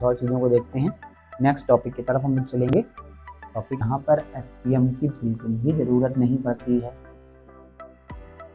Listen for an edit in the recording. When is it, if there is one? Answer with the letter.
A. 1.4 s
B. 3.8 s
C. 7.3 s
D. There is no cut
B